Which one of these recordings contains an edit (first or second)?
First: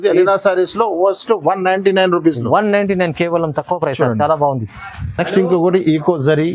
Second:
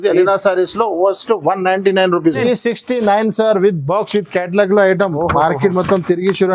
second